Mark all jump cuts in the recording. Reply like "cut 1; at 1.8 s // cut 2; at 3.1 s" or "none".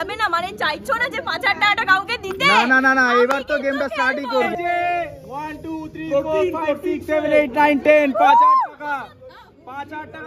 cut 1; at 4.5 s